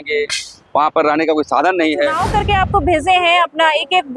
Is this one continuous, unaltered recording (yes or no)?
no